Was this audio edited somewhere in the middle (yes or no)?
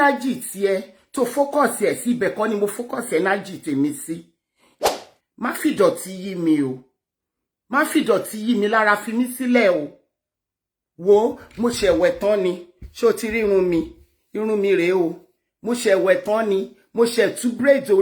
yes